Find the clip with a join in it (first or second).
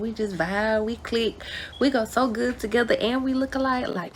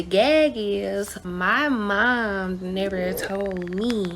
second